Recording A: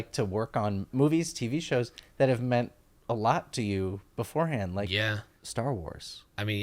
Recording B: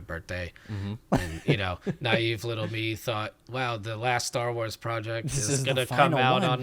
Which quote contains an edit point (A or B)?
A